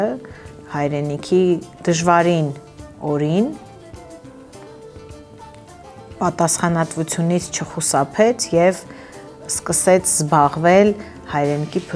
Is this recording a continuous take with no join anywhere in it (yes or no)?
yes